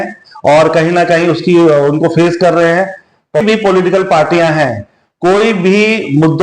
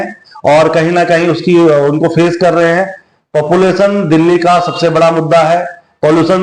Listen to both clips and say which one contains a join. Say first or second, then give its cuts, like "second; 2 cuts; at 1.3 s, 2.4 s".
first; 1 cut; at 3.4 s